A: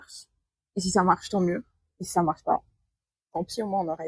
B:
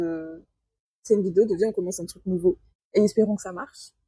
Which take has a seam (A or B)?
B